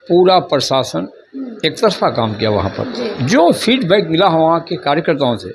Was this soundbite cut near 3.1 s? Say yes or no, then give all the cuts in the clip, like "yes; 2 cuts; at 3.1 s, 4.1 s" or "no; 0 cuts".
no; 0 cuts